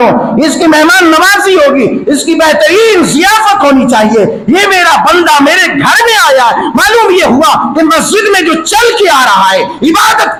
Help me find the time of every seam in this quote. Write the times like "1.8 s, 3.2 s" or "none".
none